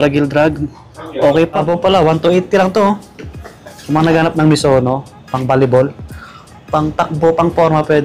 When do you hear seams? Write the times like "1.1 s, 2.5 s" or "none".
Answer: 1.6 s